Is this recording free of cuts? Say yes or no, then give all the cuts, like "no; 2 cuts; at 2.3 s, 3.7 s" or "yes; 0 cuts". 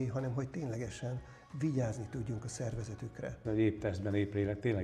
no; 1 cut; at 3.4 s